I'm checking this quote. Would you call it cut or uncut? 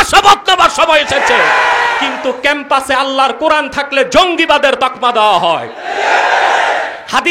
cut